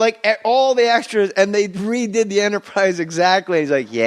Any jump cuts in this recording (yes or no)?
yes